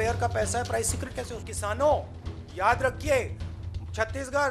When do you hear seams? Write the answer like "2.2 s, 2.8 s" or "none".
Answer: 1.5 s